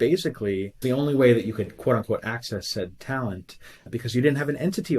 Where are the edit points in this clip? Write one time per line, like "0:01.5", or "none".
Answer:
0:00.8
0:03.9